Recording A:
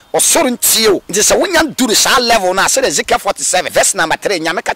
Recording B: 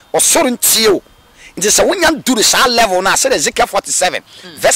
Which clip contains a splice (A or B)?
A